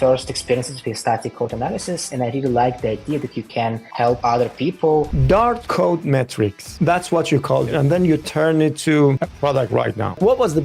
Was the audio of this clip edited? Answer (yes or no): yes